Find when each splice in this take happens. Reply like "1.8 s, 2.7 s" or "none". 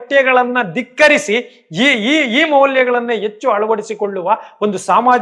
none